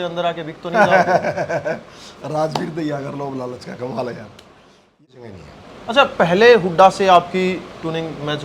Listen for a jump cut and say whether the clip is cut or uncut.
cut